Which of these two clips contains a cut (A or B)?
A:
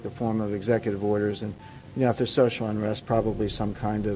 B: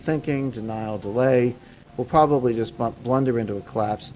B